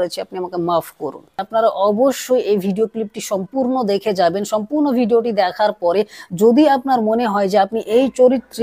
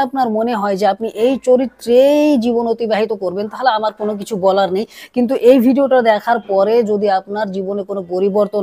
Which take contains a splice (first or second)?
first